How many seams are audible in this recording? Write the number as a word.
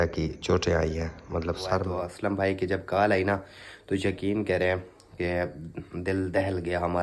one